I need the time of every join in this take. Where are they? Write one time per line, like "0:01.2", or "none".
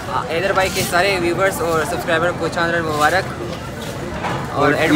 none